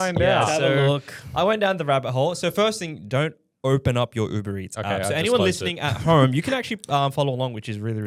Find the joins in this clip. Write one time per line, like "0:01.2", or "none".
none